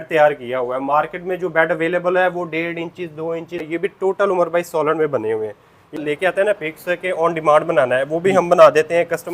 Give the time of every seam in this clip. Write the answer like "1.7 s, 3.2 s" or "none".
3.8 s, 6.0 s